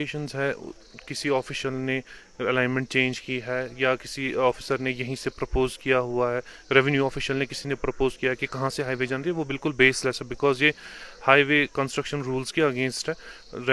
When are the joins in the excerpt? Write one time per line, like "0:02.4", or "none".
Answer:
none